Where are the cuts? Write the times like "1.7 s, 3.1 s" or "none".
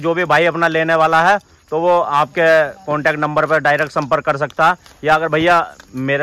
none